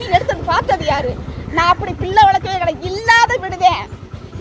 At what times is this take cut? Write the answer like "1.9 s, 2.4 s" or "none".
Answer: none